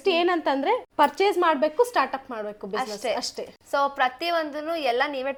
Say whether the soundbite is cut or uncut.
uncut